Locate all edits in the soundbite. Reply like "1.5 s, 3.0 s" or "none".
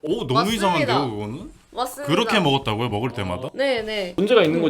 3.4 s

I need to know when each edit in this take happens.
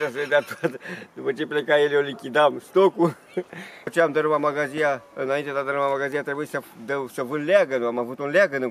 3.9 s

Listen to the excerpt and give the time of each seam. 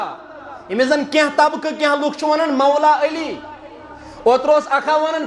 none

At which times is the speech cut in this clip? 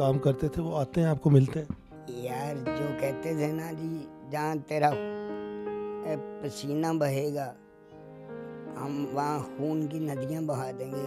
2.0 s, 4.9 s, 6.0 s, 7.5 s, 8.8 s

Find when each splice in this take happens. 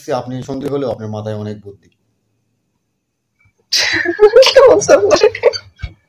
none

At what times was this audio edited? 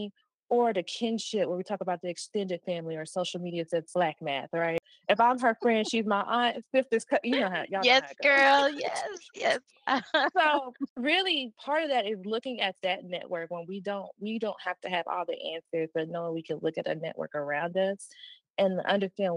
4.8 s, 10.8 s

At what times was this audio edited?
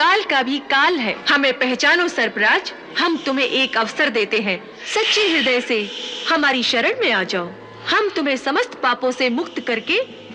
1.2 s, 2.9 s, 4.7 s

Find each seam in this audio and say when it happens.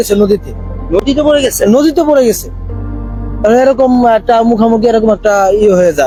none

